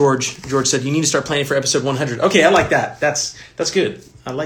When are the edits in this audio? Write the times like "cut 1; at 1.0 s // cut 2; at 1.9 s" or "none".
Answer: none